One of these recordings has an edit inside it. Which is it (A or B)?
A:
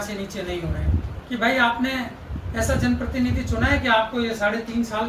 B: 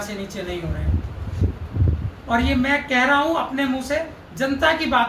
A